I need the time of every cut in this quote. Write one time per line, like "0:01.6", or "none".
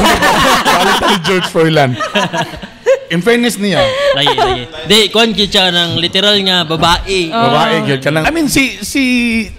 0:08.3